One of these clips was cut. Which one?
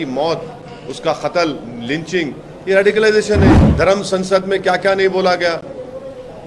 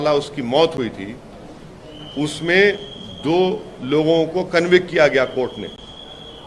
first; 1 cut; at 3.6 s

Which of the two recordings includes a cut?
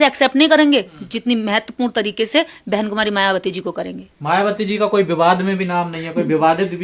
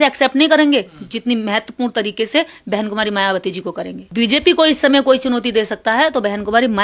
second; 1 cut; at 4.1 s

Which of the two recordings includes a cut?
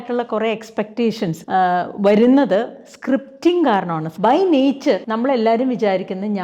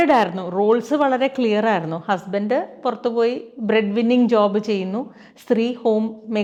first; 3 cuts; at 1.4 s, 4.0 s, 5.1 s

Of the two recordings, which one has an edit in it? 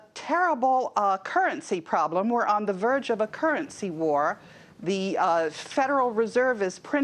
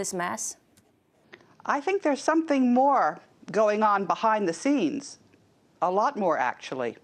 first; 1 cut; at 4.8 s

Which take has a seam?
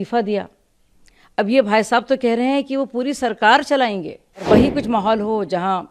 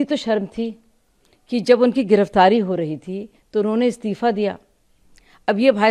first; 1 cut; at 4.4 s

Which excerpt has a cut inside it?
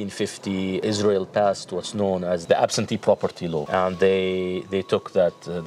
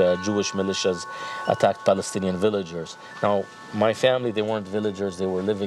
first; 3 cuts; at 0.8 s, 2.4 s, 3.6 s

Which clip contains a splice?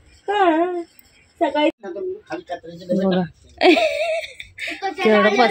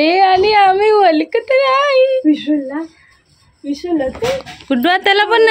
first; 1 cut; at 1.7 s

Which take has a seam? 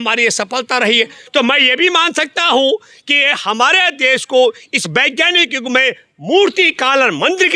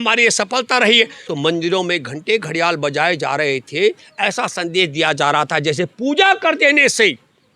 second; 1 cut; at 1.2 s

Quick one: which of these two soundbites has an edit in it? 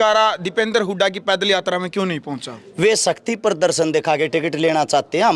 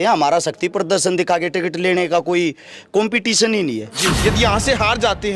second; 1 cut; at 4.0 s

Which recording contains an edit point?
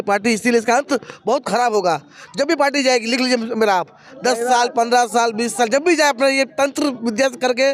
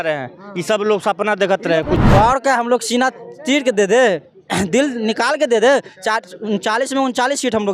second; 1 cut; at 2.0 s

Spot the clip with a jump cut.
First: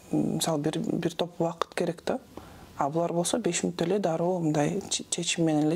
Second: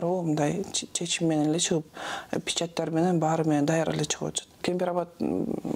second; 1 cut; at 4.6 s

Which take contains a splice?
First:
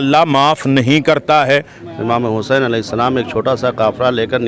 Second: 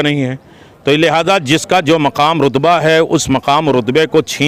first; 1 cut; at 1.8 s

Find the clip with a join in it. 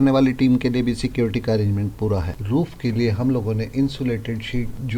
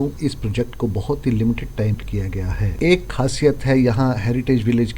second; 1 cut; at 2.0 s

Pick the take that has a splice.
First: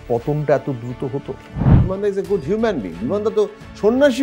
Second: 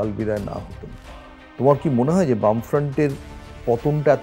first; 1 cut; at 1.8 s

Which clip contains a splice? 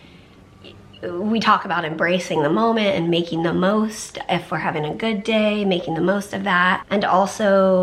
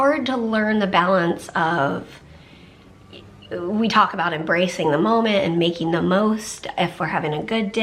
first; 1 cut; at 6.8 s

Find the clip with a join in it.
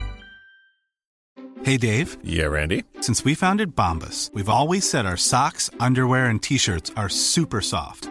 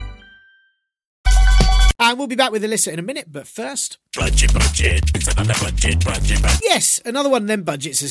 first; 1 cut; at 1.1 s

